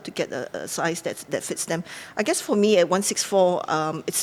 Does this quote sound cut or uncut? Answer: uncut